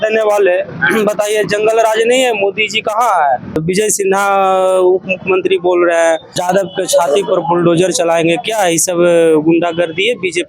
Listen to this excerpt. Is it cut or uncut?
cut